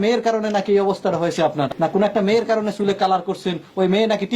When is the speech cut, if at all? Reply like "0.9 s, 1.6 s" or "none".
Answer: 1.7 s